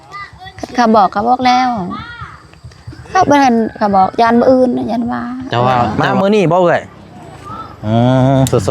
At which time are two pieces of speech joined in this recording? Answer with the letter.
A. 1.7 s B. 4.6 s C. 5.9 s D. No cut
C